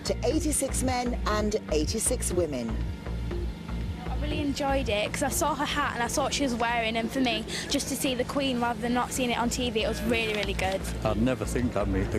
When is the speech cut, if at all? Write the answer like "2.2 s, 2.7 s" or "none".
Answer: 2.1 s